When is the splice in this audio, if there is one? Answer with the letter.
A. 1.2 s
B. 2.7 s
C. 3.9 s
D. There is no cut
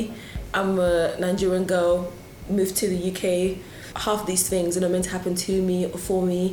C